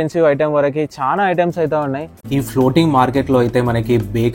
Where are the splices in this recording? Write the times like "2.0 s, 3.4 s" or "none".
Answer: 2.1 s